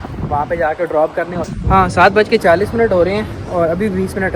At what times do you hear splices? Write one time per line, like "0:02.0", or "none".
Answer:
0:01.5